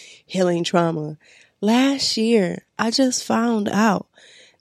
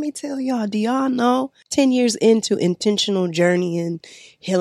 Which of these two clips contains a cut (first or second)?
second